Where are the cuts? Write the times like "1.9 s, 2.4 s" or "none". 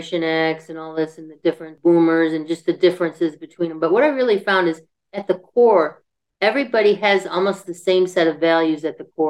1.8 s